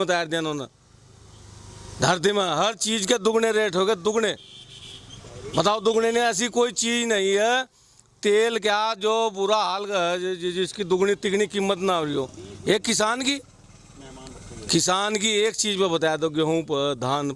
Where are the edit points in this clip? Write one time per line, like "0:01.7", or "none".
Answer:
none